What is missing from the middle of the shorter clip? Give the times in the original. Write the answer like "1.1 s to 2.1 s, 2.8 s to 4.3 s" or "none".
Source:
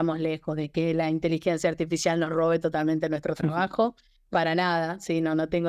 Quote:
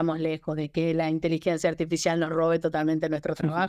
none